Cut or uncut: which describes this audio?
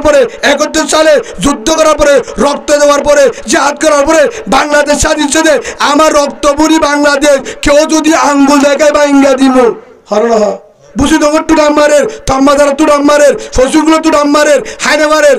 cut